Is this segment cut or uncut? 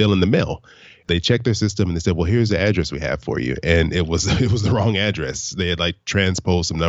cut